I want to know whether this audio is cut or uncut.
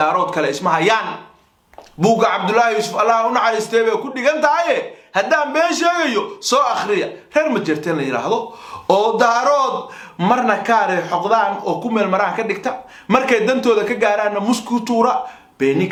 uncut